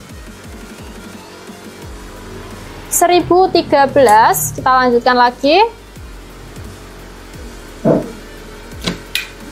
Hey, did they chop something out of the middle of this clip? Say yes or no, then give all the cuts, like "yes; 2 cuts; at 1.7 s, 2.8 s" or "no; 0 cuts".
no; 0 cuts